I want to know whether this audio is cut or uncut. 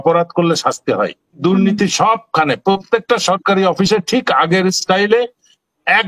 cut